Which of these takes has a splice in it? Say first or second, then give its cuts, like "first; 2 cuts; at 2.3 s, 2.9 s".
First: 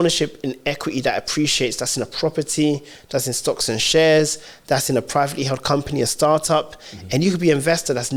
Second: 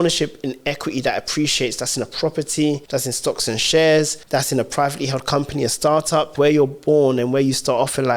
second; 3 cuts; at 2.8 s, 4.2 s, 6.3 s